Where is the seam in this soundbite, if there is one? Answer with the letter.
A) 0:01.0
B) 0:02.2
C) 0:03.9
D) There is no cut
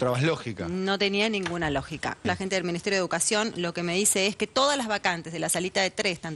B